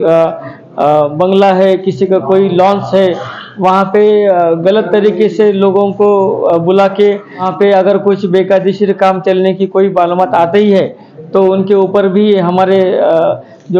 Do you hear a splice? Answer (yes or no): yes